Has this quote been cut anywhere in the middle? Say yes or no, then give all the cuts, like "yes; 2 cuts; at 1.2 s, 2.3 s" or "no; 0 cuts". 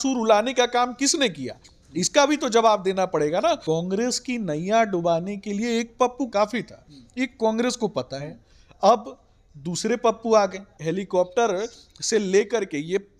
yes; 3 cuts; at 3.6 s, 6.3 s, 10.7 s